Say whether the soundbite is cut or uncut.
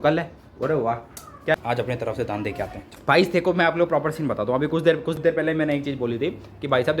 cut